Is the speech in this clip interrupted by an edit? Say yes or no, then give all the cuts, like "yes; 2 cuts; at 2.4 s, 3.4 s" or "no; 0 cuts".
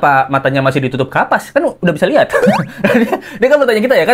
no; 0 cuts